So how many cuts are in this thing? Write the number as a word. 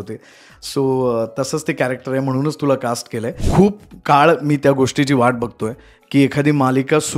one